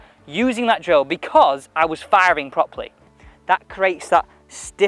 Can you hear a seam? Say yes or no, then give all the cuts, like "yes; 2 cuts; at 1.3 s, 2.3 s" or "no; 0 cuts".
yes; 1 cut; at 3.2 s